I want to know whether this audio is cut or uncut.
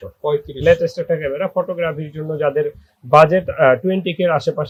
uncut